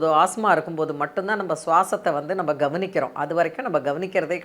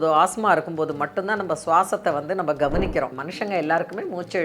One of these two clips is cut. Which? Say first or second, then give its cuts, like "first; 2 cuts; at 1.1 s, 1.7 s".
second; 1 cut; at 3.1 s